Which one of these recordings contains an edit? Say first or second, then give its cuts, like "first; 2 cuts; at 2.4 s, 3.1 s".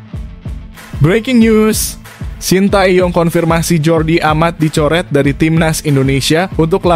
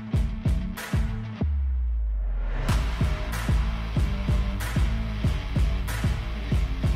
first; 1 cut; at 1.0 s